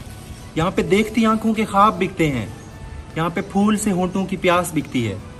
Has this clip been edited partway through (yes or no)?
no